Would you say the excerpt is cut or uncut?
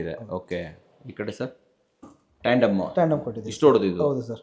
uncut